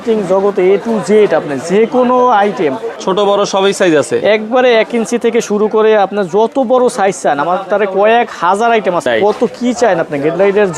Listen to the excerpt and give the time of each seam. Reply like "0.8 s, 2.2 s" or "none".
2.9 s, 9.0 s